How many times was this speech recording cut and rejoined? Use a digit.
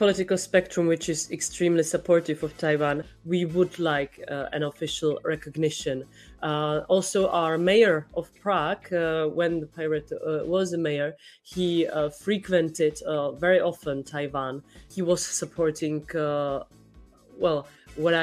2